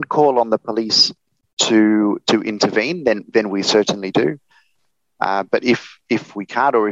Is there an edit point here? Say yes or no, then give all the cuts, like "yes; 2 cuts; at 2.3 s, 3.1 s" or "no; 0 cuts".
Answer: no; 0 cuts